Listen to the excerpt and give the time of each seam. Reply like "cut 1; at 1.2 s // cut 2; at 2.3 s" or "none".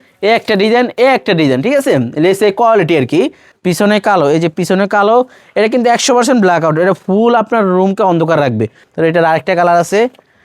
cut 1; at 3.5 s // cut 2; at 8.8 s